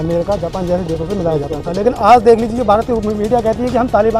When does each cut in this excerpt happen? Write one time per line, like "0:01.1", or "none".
none